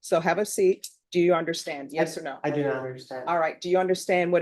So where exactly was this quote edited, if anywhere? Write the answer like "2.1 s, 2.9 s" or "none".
0.9 s